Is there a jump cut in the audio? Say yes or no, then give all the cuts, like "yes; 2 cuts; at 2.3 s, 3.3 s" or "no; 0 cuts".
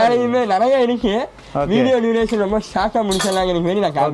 no; 0 cuts